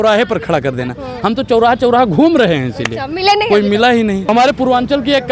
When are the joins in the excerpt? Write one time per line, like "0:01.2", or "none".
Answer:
0:04.3